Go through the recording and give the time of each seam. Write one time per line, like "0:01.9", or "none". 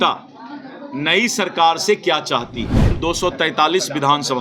0:02.9